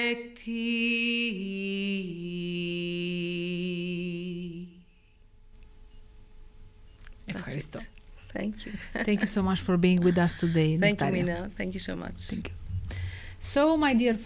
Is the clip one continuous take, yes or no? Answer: yes